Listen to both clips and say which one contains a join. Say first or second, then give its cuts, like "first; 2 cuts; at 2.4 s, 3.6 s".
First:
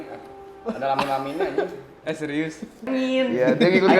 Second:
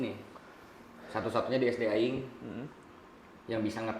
first; 1 cut; at 2.8 s